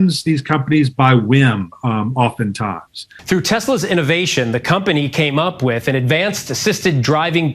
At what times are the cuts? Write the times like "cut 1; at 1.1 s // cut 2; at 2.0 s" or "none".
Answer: cut 1; at 3.0 s